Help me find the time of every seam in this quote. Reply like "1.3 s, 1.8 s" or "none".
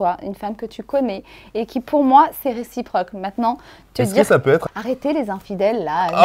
4.6 s